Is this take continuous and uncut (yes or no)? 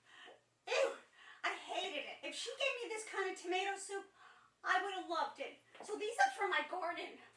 no